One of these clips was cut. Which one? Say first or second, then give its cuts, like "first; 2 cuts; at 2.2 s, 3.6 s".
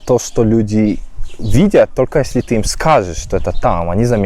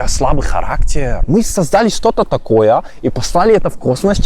second; 1 cut; at 1.2 s